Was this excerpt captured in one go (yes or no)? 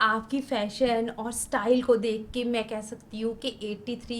yes